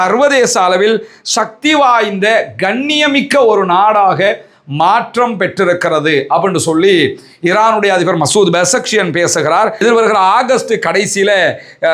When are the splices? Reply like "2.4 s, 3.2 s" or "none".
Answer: 9.8 s